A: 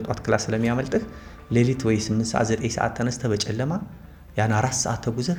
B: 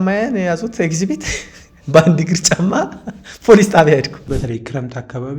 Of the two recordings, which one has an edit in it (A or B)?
B